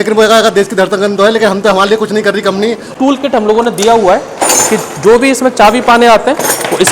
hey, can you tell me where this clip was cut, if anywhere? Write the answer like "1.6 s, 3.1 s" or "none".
2.9 s